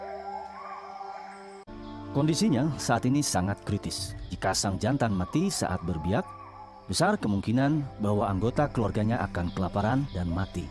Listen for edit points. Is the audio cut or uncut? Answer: cut